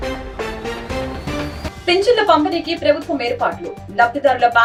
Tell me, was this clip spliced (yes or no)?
no